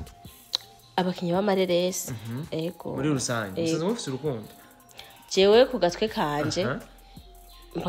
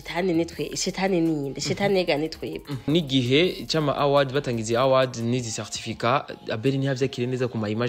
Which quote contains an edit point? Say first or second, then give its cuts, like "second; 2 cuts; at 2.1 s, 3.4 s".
second; 1 cut; at 2.9 s